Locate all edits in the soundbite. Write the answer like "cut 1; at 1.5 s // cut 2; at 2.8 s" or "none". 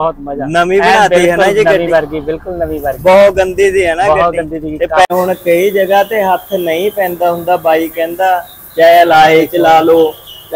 cut 1; at 5.1 s